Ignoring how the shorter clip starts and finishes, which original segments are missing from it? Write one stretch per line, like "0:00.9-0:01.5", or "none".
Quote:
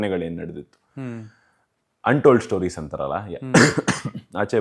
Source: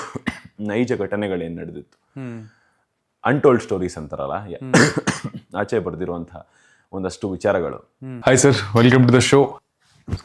none